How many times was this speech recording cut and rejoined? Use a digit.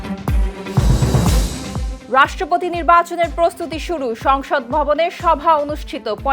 1